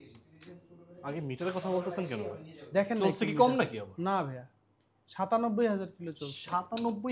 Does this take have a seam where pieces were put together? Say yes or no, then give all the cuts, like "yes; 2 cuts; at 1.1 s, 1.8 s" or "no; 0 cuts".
no; 0 cuts